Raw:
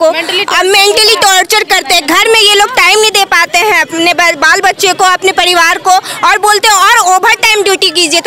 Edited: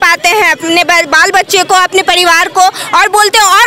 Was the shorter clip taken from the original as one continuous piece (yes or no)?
yes